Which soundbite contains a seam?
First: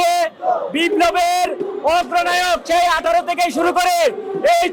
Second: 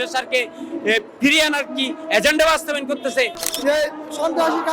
second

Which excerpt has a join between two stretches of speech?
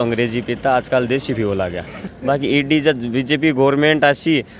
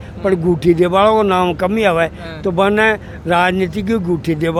first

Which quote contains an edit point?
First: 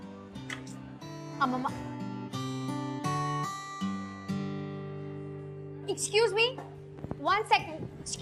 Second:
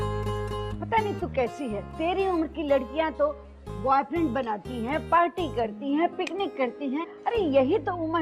second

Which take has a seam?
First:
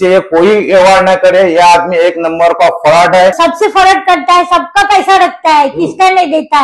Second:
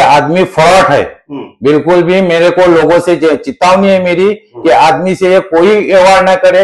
first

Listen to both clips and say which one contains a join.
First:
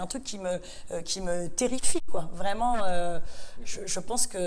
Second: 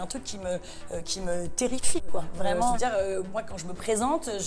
second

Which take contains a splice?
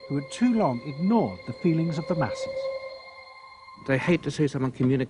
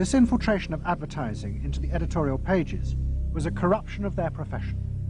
second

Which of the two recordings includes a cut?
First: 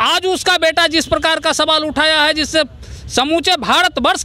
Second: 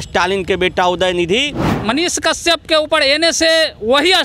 second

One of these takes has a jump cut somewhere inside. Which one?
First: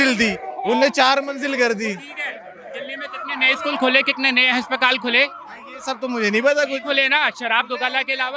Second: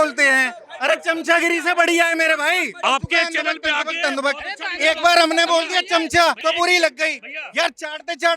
second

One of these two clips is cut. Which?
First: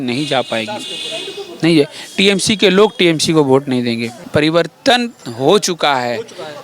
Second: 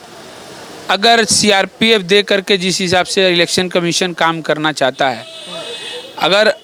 first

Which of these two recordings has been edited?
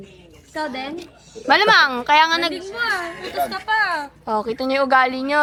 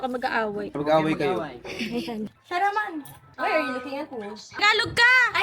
second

